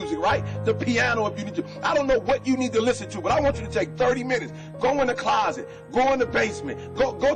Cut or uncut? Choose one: uncut